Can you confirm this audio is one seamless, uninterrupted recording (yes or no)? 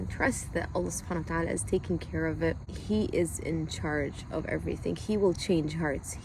no